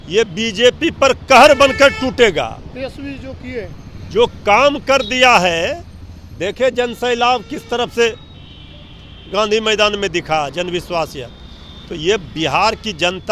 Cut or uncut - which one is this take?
uncut